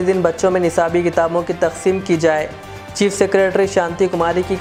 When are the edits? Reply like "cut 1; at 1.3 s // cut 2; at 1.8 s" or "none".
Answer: none